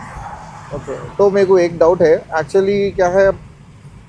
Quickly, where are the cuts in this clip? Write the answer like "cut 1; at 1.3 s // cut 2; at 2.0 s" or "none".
none